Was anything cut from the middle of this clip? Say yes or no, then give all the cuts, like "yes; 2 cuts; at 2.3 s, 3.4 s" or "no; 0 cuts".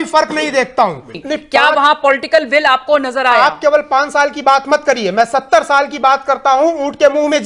yes; 1 cut; at 1.1 s